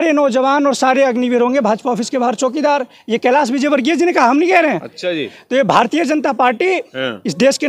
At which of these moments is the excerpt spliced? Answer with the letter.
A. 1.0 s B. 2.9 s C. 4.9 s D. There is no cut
D